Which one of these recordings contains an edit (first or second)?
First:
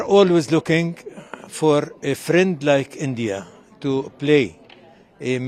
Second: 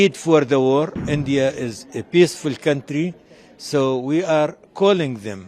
second